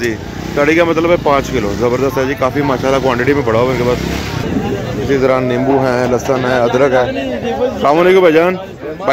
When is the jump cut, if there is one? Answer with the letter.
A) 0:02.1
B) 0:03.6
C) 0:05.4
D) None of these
D